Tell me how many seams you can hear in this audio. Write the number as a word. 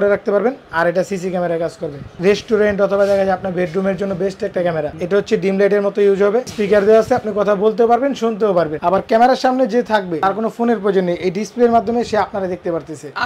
five